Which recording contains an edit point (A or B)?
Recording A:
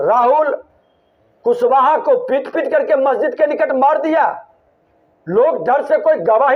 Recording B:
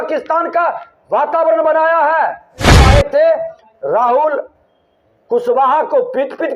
B